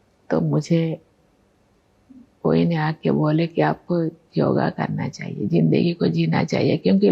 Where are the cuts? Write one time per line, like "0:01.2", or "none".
none